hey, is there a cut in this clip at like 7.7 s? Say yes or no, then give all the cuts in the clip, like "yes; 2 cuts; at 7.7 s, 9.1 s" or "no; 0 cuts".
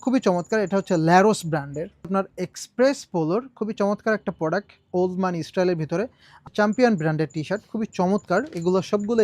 no; 2 cuts; at 2.1 s, 6.4 s